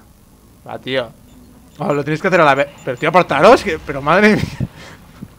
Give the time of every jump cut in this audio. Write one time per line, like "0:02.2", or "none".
none